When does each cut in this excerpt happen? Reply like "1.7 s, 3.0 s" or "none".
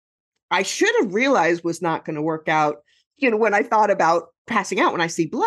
3.1 s, 4.4 s